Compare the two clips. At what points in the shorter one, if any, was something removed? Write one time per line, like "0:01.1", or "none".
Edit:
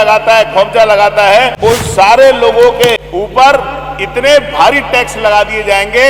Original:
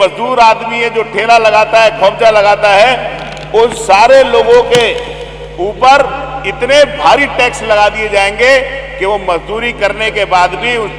0:01.5
0:03.0